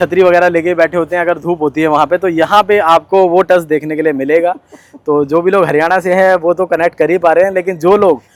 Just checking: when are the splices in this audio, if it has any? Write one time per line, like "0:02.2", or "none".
none